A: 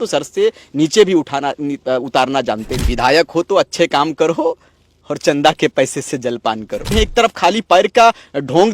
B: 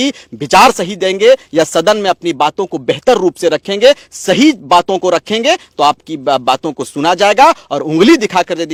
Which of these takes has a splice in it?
A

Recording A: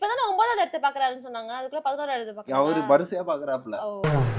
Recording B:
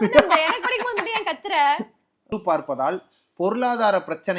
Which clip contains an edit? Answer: B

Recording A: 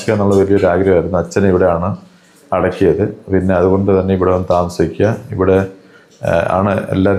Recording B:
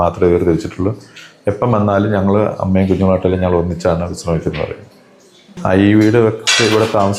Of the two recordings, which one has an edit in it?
B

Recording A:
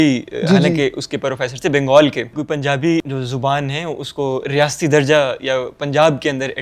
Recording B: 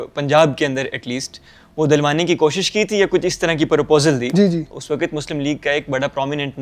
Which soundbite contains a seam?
A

